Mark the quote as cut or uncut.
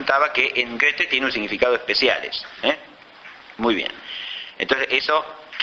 cut